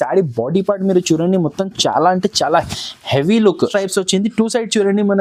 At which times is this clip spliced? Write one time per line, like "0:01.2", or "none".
0:03.7